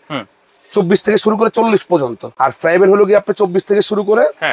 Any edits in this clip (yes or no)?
yes